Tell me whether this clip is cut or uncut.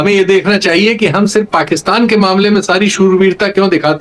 uncut